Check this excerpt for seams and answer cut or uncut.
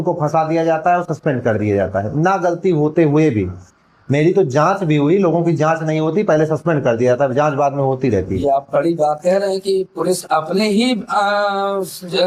uncut